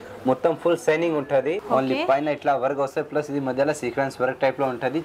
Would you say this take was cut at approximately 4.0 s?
no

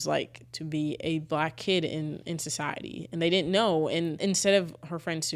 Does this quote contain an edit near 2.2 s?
no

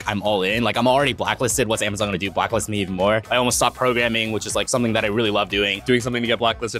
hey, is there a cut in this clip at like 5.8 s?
yes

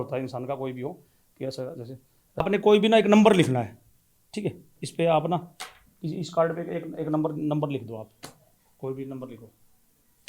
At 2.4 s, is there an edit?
yes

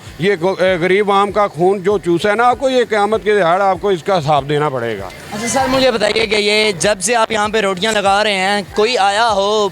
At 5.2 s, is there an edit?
no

